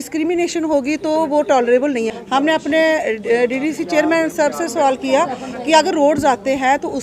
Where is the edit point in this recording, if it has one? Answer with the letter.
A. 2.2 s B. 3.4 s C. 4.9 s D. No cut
A